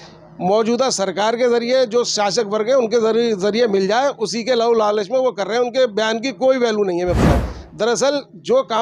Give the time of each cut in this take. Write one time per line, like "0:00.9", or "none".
0:07.5